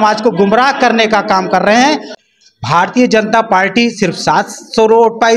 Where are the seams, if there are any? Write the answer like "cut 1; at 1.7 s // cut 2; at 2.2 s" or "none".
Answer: cut 1; at 2.1 s